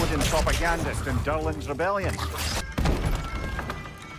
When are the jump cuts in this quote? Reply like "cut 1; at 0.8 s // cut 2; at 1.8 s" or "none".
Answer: cut 1; at 2.6 s